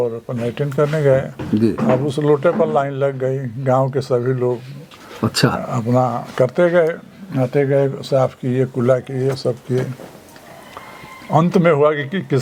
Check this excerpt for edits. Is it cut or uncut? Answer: uncut